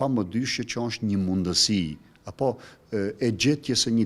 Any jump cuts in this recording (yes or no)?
no